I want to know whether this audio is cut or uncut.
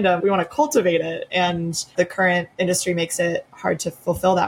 cut